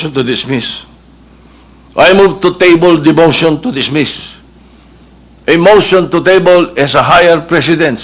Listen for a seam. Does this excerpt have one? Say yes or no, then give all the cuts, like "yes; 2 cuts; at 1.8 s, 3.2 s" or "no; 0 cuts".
no; 0 cuts